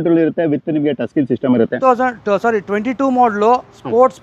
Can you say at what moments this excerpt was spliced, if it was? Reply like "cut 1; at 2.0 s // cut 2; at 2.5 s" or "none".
cut 1; at 1.8 s